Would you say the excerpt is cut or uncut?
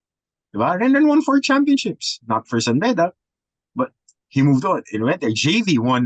uncut